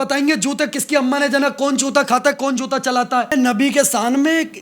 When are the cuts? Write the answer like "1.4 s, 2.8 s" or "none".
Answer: 3.3 s